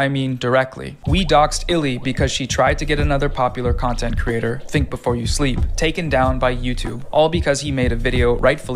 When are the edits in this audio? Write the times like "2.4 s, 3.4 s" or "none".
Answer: none